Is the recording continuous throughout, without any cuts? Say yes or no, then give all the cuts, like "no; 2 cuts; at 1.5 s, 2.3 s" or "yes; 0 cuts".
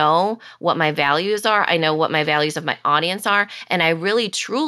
yes; 0 cuts